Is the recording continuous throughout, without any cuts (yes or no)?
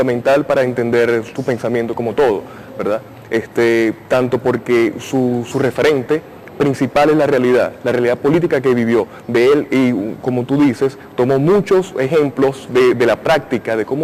yes